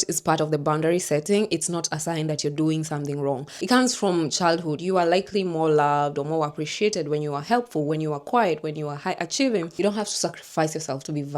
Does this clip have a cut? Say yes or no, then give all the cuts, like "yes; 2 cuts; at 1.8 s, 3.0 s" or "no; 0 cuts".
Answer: yes; 2 cuts; at 3.5 s, 9.7 s